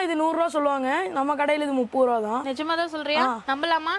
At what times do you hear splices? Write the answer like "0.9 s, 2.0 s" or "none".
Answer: none